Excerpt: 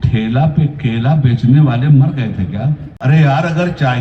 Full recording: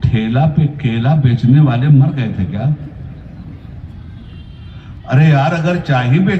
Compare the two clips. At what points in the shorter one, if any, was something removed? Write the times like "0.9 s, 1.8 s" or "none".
2.9 s